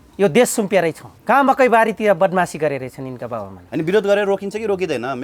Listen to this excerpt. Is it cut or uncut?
cut